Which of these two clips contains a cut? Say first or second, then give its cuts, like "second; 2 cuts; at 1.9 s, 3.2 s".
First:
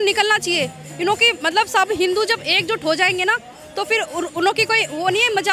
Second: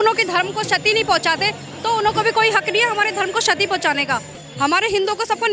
second; 1 cut; at 4.4 s